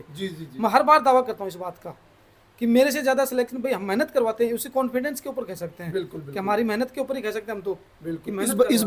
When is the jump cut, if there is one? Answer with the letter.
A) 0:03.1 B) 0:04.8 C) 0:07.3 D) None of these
D